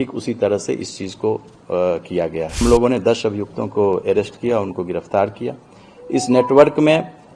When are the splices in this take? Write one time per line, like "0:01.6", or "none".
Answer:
0:02.6